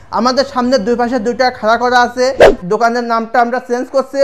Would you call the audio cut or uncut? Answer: cut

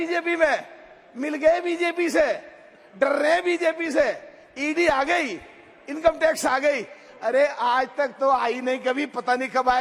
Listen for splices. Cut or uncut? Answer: uncut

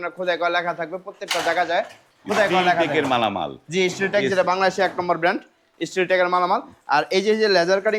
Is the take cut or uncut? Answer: uncut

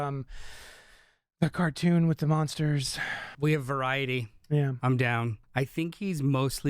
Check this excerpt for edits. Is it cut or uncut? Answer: cut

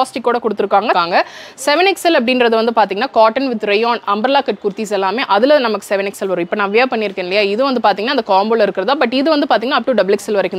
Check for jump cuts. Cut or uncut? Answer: cut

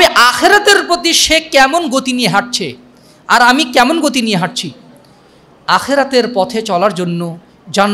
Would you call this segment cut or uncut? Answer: uncut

